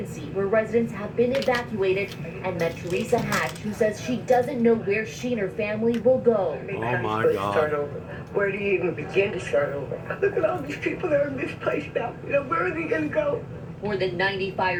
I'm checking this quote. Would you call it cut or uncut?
uncut